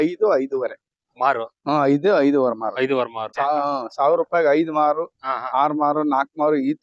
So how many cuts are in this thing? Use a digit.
1